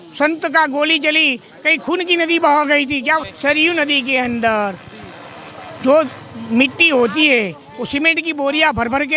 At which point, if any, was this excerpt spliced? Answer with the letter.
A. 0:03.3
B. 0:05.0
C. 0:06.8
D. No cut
A